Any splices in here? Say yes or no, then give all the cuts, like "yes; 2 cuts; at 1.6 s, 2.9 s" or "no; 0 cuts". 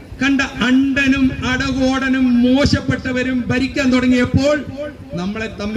no; 0 cuts